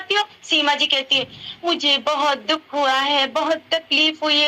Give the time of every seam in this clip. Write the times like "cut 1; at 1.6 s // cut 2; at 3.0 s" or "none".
none